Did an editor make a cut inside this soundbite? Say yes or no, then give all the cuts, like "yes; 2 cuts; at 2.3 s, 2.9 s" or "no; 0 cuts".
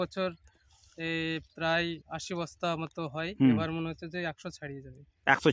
no; 0 cuts